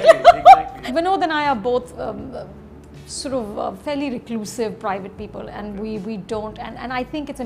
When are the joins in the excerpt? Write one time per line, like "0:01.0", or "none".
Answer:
0:00.9